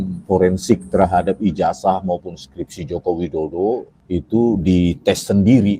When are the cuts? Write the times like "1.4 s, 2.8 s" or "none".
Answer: 3.9 s